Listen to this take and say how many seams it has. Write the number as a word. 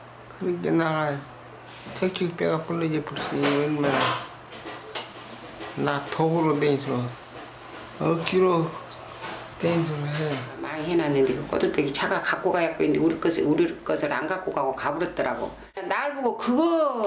one